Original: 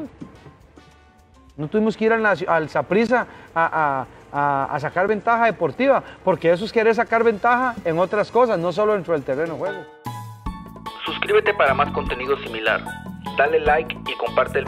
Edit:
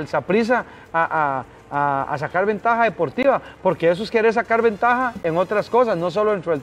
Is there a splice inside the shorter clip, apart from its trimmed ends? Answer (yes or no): no